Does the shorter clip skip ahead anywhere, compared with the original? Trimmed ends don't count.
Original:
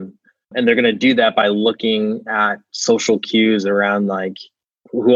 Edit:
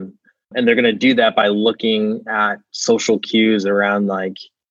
no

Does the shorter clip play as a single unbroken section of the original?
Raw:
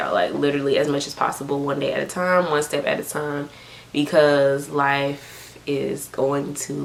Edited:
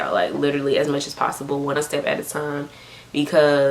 no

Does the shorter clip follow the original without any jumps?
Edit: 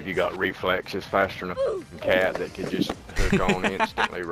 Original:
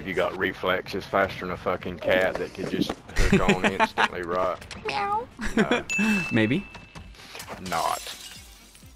yes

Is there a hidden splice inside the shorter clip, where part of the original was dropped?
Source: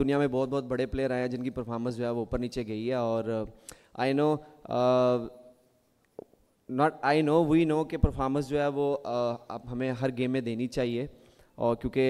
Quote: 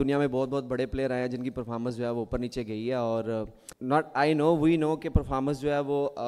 yes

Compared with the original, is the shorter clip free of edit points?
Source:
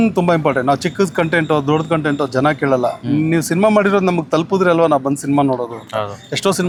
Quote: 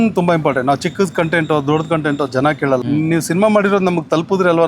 no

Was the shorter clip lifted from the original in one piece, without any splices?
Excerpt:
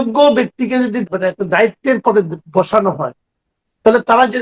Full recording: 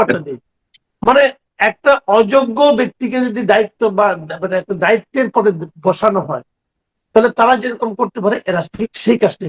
no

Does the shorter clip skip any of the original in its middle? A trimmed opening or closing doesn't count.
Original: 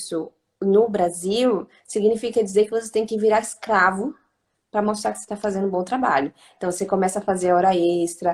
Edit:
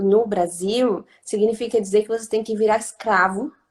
no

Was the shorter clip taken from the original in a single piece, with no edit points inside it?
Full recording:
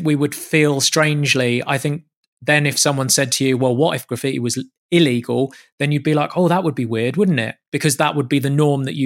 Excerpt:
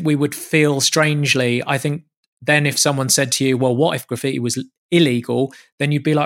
yes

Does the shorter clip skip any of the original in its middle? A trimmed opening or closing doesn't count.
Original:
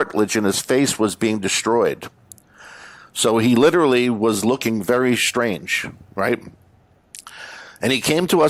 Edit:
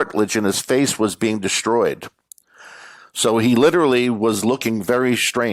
no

